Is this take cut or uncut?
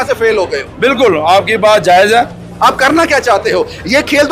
cut